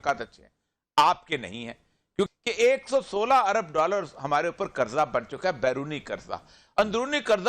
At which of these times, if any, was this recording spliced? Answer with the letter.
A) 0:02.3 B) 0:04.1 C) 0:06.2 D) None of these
A